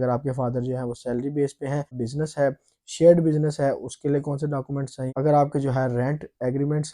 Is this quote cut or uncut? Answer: cut